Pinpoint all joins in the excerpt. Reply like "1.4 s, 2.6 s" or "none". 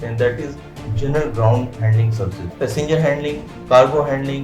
2.5 s